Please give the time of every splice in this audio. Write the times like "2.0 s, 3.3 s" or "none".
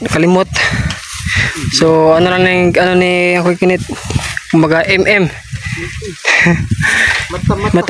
none